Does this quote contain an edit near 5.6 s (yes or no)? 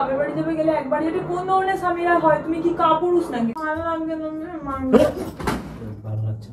no